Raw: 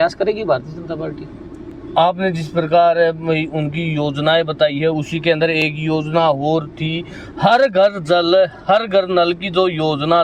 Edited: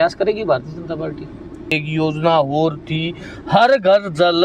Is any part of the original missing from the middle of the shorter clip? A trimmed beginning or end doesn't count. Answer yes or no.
yes